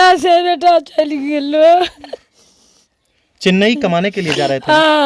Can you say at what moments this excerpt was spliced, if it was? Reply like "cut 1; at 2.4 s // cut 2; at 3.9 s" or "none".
none

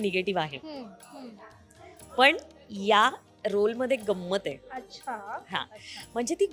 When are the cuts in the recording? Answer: none

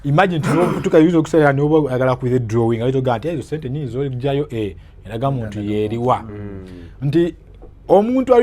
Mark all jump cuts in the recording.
none

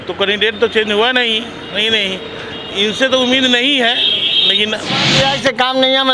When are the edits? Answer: cut 1; at 5.1 s

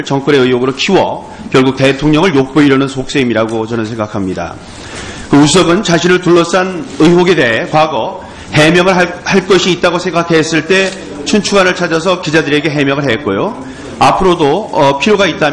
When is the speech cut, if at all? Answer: cut 1; at 1.4 s

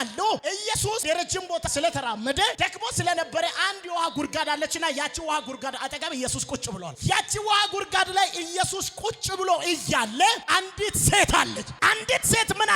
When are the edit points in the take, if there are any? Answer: cut 1; at 11.6 s

